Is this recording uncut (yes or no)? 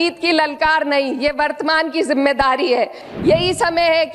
no